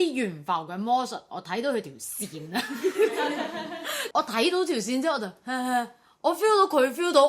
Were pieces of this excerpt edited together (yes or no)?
yes